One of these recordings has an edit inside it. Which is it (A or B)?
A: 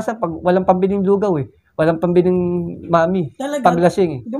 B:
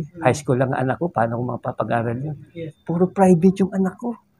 B